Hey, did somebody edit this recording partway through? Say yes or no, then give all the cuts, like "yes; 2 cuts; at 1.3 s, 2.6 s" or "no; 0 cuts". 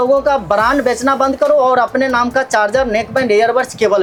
no; 0 cuts